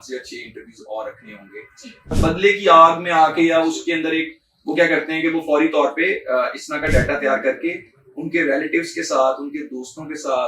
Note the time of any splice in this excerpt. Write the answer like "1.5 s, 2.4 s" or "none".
2.1 s